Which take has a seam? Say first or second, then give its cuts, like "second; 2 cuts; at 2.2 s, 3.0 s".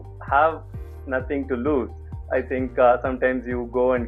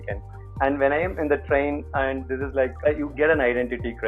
second; 1 cut; at 2.8 s